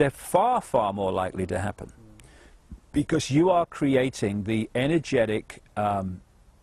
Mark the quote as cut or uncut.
cut